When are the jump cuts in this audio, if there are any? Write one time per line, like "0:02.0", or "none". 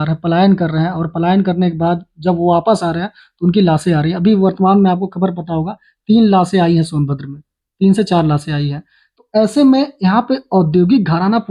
none